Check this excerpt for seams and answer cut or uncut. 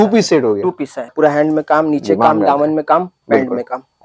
cut